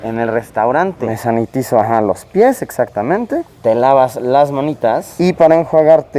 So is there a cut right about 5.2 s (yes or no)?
no